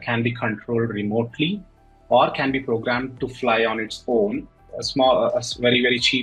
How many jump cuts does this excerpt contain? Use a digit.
1